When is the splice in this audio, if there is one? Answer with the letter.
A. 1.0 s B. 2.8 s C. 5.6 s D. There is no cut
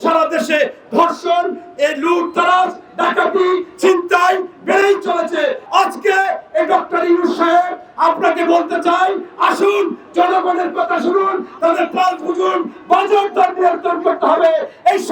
C